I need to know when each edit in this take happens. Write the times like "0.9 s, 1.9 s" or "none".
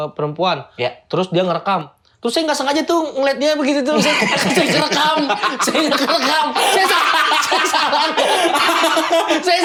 none